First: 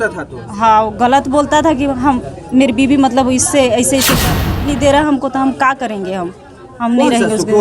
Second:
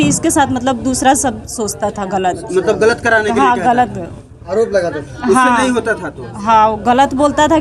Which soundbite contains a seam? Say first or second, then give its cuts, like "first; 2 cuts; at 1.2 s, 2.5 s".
first; 1 cut; at 4.5 s